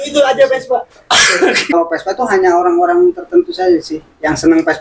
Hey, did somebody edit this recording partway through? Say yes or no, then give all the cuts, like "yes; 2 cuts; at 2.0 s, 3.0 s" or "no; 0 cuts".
yes; 1 cut; at 1.7 s